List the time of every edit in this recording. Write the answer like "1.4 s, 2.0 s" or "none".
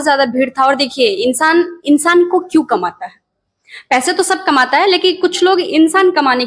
none